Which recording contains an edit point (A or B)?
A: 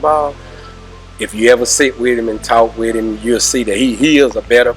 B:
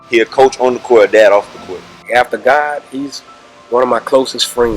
B